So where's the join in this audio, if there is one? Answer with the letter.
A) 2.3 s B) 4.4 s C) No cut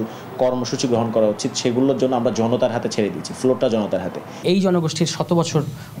B